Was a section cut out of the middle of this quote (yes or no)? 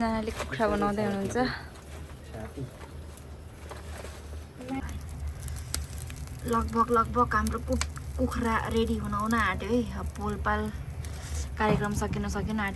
yes